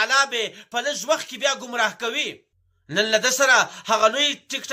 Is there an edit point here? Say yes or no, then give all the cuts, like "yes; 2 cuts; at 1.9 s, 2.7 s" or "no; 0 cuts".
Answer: no; 0 cuts